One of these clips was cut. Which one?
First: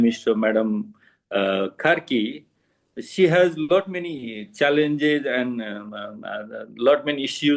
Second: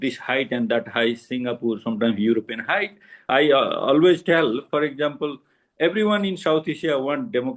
second; 1 cut; at 3.2 s

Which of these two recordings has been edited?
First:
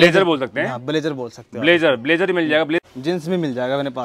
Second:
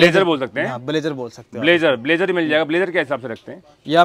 first; 1 cut; at 2.8 s

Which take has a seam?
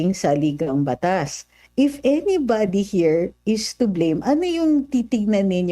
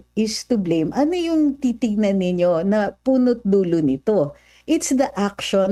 first; 1 cut; at 1.6 s

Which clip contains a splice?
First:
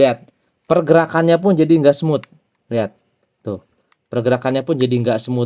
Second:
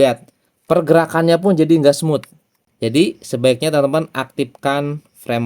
second; 1 cut; at 2.6 s

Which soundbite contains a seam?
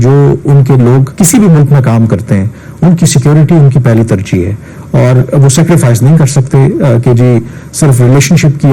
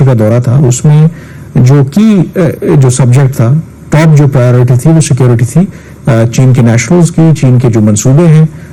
first; 1 cut; at 1.1 s

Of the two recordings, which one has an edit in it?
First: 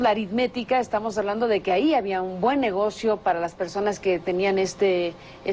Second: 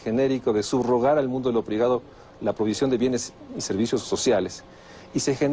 first; 1 cut; at 2.6 s

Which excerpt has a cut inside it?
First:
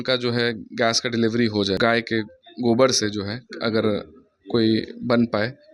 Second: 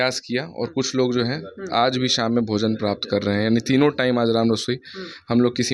first; 1 cut; at 1.8 s

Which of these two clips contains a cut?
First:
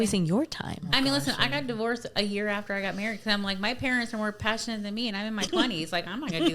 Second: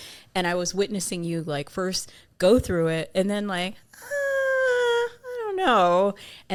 first; 1 cut; at 5.5 s

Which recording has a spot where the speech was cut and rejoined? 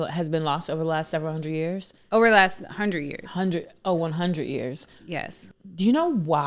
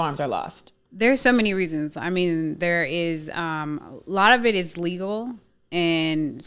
first; 1 cut; at 5.4 s

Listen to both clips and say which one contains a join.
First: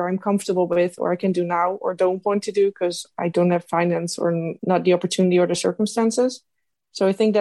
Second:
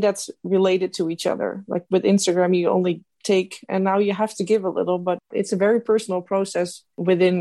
second; 1 cut; at 5.2 s

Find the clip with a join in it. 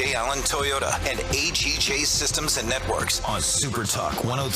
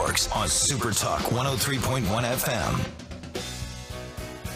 first; 1 cut; at 1.0 s

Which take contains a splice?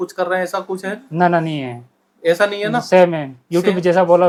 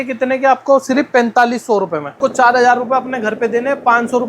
second; 1 cut; at 2.2 s

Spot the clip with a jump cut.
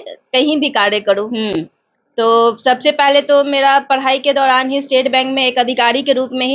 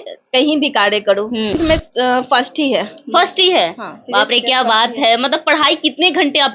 second; 1 cut; at 1.5 s

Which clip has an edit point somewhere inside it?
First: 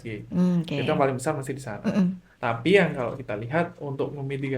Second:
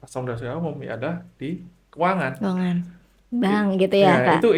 first; 1 cut; at 2.3 s

